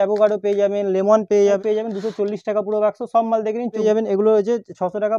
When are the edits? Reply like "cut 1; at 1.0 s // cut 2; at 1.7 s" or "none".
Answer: cut 1; at 1.6 s // cut 2; at 3.8 s